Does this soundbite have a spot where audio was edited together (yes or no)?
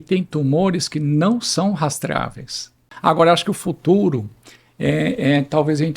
yes